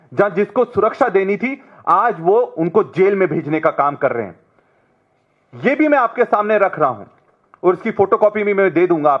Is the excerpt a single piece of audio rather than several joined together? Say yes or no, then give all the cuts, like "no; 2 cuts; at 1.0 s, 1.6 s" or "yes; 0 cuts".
yes; 0 cuts